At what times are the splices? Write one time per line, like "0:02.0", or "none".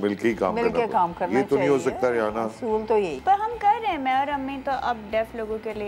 0:03.2